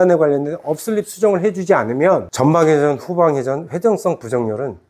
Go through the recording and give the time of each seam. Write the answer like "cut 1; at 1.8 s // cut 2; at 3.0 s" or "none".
cut 1; at 2.3 s